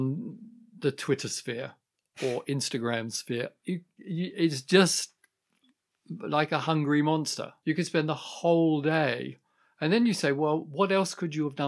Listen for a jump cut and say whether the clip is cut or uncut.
cut